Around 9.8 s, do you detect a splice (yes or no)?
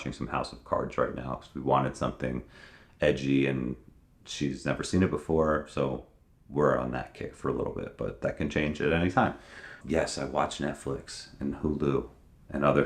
yes